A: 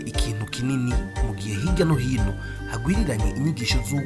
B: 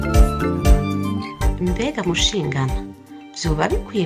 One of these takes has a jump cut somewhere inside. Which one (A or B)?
B